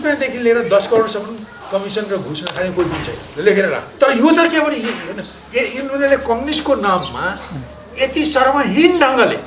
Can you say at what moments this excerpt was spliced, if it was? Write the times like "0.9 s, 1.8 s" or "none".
3.8 s